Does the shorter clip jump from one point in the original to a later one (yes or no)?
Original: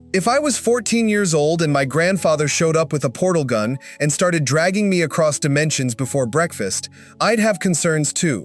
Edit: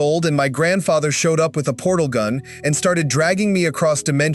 no